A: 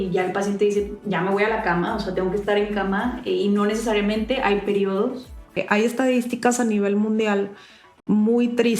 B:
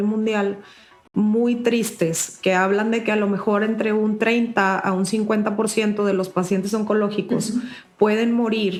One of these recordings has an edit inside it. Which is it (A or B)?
A